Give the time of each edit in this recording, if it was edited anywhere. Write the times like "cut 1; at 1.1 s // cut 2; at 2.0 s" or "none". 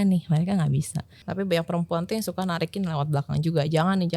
cut 1; at 1.3 s